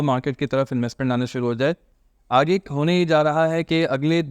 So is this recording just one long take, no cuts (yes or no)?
no